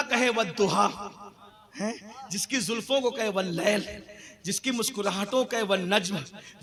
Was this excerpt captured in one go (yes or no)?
yes